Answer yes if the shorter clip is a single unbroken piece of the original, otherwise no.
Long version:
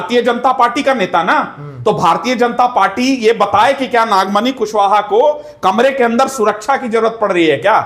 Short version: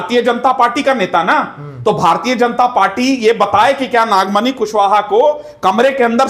yes